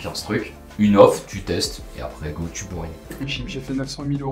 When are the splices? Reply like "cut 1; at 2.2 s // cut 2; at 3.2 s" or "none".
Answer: cut 1; at 3.3 s